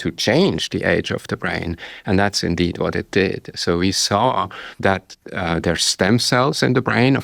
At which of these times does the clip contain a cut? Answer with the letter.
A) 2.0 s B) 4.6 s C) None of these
B